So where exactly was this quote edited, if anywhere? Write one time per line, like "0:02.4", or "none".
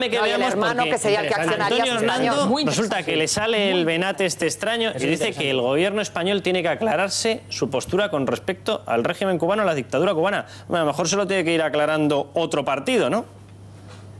0:02.2